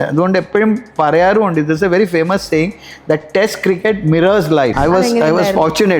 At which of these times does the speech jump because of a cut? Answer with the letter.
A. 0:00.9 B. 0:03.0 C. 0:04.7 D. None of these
C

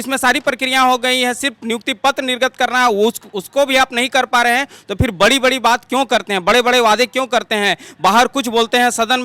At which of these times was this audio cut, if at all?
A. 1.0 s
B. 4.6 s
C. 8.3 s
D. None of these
D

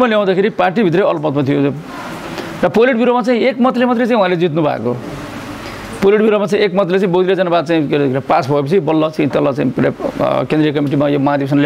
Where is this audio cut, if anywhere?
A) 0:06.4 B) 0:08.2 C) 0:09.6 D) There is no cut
D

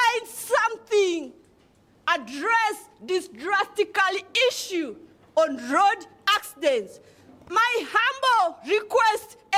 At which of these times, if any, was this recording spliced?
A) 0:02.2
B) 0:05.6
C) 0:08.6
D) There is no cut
D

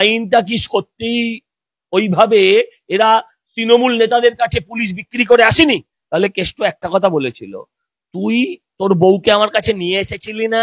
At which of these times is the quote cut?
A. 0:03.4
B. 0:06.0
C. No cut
B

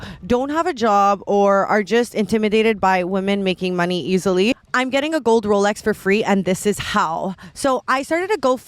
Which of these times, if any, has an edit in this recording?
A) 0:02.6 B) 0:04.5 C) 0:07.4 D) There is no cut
B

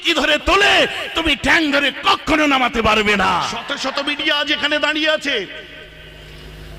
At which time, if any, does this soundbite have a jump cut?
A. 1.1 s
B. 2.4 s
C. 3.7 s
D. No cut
C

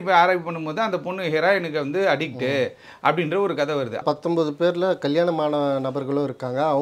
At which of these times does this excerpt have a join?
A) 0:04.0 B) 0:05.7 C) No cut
A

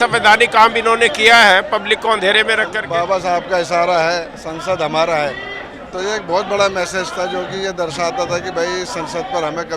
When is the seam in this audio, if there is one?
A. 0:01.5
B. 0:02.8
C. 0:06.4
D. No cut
B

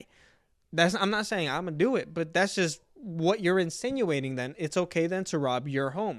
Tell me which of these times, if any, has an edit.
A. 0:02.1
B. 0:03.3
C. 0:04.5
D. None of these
D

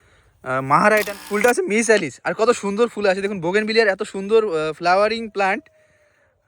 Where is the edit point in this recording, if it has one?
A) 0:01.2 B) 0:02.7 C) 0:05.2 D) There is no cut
A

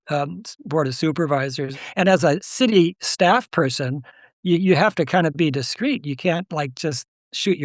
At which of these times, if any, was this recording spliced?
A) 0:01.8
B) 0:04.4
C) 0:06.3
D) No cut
A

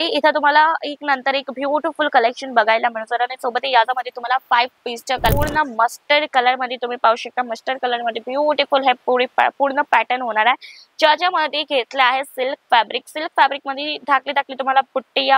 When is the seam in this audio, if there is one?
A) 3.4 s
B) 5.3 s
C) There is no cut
B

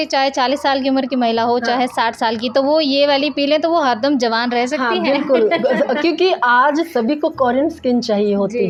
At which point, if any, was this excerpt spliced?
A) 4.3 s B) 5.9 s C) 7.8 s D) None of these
D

